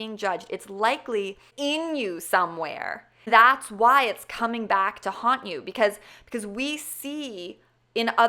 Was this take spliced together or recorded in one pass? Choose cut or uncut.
cut